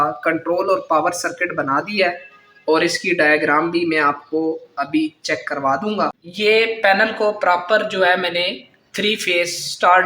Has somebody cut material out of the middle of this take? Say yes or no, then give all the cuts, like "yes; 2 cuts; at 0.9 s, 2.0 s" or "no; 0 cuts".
yes; 1 cut; at 6.2 s